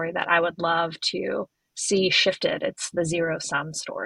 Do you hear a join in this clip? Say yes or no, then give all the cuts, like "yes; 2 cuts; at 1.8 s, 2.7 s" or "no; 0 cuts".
no; 0 cuts